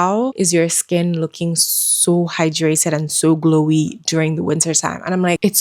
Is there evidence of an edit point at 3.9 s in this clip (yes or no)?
no